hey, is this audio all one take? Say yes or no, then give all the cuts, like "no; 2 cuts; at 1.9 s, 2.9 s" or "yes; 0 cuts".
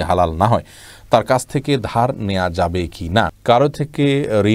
no; 1 cut; at 3.4 s